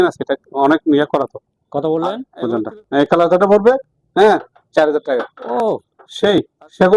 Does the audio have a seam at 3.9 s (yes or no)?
no